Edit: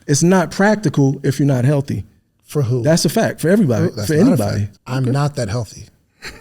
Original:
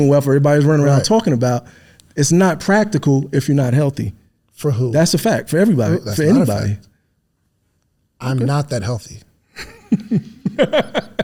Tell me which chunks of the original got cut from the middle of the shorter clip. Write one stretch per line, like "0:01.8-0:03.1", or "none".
0:06.9-0:08.1